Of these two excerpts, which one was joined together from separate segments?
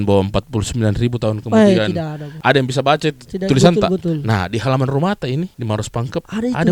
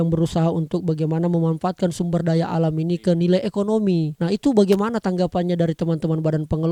first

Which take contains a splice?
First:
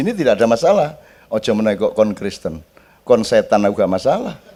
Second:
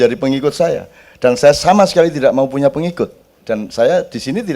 second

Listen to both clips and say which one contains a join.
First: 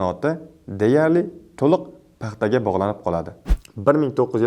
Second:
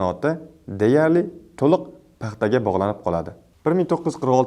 first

